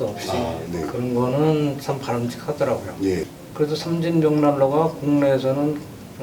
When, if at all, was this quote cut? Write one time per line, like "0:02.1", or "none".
0:03.4